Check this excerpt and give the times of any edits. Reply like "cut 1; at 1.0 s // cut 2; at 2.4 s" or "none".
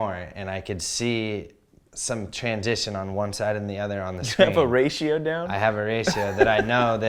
none